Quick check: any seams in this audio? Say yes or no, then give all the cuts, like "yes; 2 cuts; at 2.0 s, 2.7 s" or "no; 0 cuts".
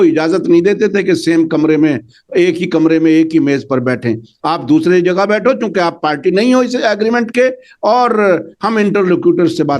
no; 0 cuts